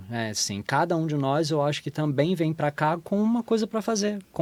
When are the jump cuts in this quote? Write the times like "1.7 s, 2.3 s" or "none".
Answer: none